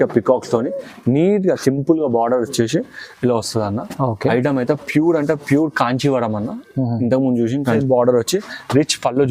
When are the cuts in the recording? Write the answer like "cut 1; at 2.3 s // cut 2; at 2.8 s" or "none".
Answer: cut 1; at 7.8 s